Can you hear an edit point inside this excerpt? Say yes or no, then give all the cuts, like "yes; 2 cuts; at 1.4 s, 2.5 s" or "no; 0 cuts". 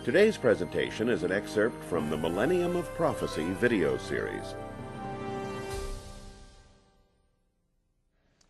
yes; 1 cut; at 6.0 s